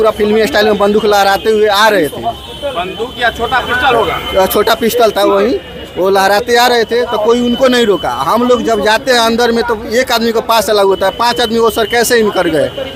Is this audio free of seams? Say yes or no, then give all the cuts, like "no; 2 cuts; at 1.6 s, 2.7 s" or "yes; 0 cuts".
yes; 0 cuts